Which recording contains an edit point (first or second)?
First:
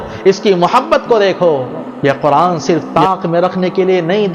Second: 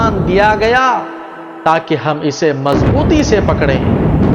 first